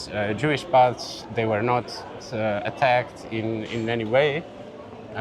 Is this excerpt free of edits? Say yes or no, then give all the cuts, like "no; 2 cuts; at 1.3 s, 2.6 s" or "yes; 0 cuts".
no; 1 cut; at 2.2 s